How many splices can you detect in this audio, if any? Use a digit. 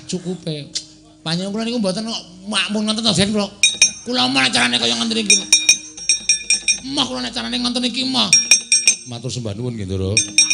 1